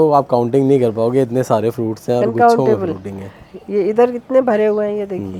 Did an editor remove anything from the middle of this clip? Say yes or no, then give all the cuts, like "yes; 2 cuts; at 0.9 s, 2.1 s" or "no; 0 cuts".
no; 0 cuts